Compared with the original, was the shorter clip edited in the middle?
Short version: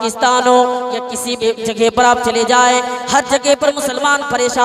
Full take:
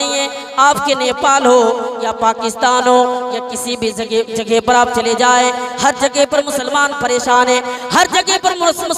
yes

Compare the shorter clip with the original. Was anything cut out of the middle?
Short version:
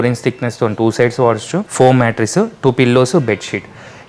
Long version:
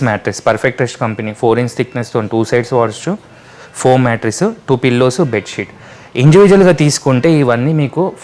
yes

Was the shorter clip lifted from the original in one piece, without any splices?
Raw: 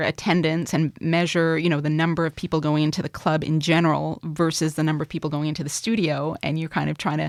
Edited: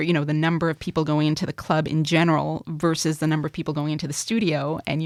yes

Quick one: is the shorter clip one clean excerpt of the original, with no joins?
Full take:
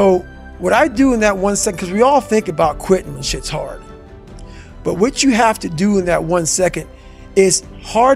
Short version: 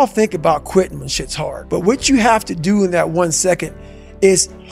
no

